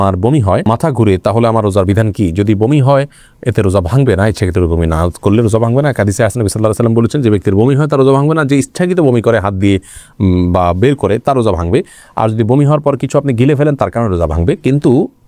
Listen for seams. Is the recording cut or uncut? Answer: uncut